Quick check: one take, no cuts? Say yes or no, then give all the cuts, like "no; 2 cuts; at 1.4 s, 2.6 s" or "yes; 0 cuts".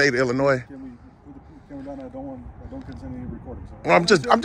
yes; 0 cuts